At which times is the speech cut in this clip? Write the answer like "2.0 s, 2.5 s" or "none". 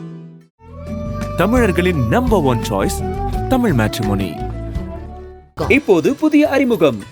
none